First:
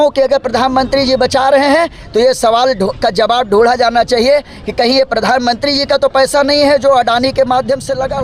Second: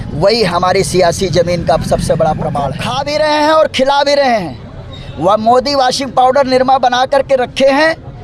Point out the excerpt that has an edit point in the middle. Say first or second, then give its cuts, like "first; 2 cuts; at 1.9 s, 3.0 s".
second; 1 cut; at 2.9 s